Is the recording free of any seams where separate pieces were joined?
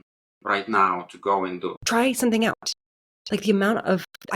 no; 1 cut; at 1.8 s

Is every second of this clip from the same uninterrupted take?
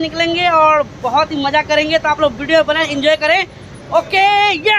yes; 0 cuts

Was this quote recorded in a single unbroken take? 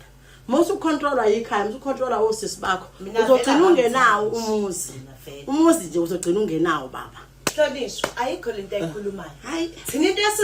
no; 1 cut; at 7.5 s

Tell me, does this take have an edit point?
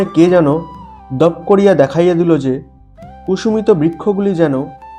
no; 0 cuts

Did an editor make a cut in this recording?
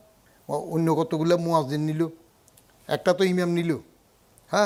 no; 0 cuts

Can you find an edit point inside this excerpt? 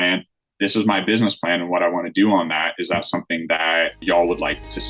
yes; 1 cut; at 4.0 s

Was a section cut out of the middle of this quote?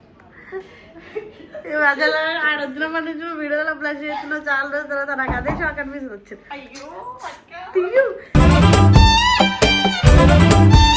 no; 0 cuts

